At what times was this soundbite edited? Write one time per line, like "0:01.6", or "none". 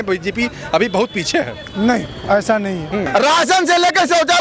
0:03.1